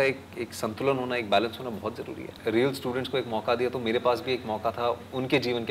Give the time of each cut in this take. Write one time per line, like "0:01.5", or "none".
0:02.3